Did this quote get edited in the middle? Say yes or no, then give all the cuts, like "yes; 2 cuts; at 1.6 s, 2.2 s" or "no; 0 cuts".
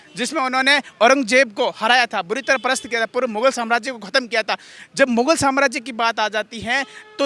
no; 0 cuts